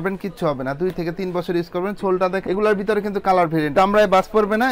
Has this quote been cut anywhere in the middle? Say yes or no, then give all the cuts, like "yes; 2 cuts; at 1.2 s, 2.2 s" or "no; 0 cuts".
yes; 1 cut; at 3.7 s